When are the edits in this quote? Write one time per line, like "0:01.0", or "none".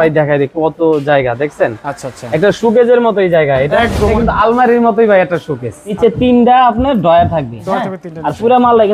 0:04.0
0:06.0